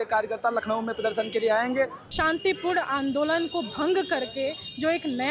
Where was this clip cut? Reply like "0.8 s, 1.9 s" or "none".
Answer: 2.0 s